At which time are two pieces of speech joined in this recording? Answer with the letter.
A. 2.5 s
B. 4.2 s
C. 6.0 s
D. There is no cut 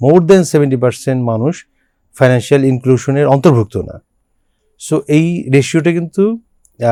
D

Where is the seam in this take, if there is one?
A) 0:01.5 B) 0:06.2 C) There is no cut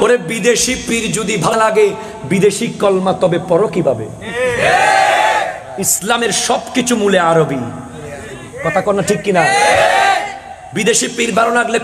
A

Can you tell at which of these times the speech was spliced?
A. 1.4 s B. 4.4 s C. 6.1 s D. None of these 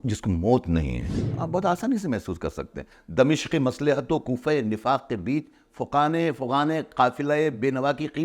A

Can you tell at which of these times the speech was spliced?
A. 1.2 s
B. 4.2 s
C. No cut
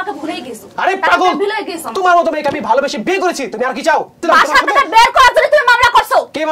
B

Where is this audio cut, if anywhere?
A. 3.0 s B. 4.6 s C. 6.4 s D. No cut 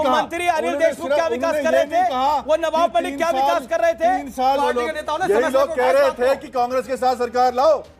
B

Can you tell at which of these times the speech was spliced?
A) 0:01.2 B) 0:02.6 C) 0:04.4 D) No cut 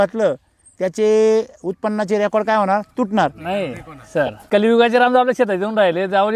C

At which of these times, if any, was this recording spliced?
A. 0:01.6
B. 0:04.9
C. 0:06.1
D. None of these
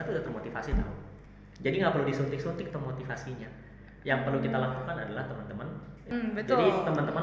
C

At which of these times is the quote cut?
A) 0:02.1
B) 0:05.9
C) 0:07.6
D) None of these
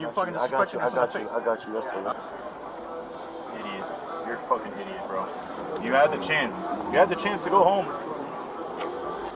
A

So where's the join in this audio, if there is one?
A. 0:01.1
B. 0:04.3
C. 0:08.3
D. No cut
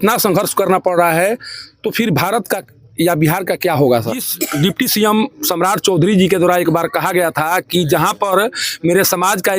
B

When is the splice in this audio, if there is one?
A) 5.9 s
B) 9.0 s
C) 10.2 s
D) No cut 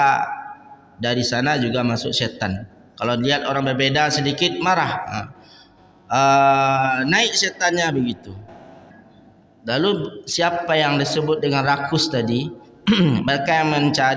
B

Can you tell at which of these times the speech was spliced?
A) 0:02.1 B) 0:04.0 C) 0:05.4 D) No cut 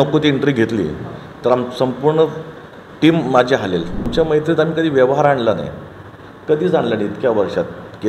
B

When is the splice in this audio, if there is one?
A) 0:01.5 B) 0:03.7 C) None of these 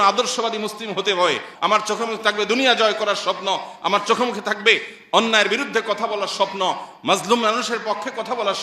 A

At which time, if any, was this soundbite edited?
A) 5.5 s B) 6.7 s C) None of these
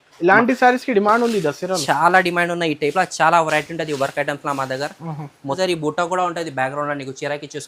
A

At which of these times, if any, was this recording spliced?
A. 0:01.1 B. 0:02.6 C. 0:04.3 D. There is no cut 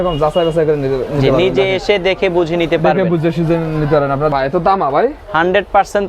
C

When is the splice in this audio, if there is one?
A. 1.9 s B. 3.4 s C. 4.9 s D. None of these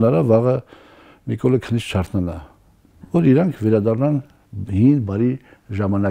D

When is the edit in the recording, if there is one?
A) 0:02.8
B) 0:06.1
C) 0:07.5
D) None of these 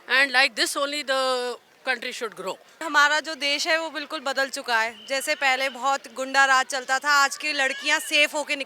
A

